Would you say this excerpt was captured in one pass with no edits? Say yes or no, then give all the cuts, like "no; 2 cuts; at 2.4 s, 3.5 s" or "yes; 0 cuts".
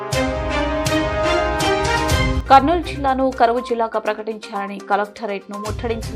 no; 1 cut; at 2.3 s